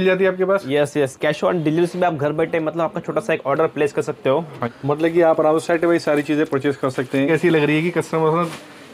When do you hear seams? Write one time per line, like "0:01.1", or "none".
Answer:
0:04.7
0:07.3